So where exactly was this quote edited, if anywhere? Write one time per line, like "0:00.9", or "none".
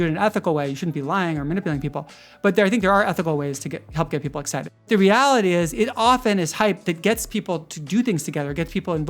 0:04.8